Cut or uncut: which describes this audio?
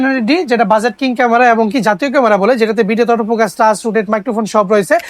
uncut